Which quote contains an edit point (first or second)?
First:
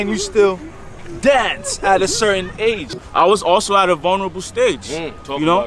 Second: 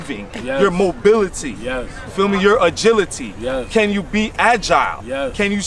first